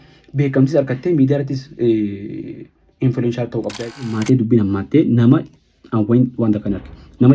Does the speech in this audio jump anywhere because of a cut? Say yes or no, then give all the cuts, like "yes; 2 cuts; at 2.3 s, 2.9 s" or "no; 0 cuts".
yes; 1 cut; at 4.2 s